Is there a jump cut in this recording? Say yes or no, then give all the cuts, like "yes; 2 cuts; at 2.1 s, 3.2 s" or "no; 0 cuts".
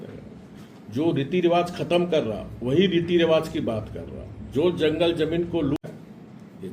yes; 1 cut; at 5.8 s